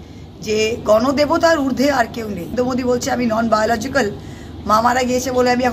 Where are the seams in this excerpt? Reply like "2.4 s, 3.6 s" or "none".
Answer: 2.5 s